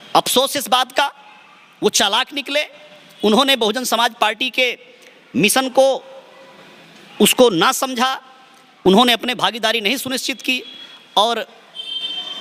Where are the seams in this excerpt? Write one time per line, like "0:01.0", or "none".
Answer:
none

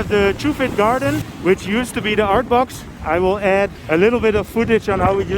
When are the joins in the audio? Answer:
0:01.3
0:03.8

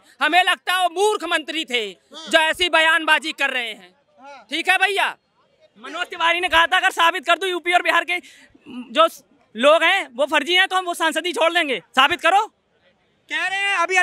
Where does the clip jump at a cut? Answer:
none

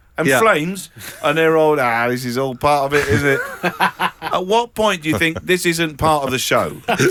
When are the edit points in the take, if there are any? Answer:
none

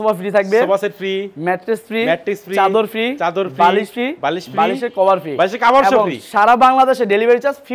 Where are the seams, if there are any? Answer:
none

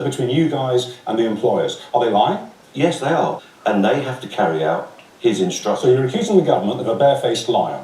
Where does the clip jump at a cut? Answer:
0:03.4

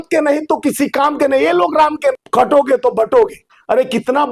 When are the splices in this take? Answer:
0:02.1

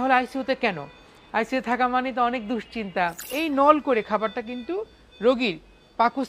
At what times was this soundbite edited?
0:03.3

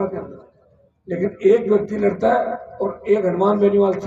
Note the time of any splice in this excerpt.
none

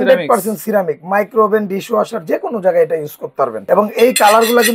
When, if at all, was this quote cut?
0:03.6

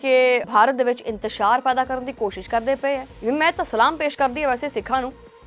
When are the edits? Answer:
0:03.1

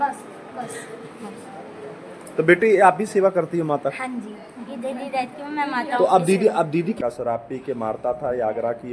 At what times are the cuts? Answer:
0:07.0

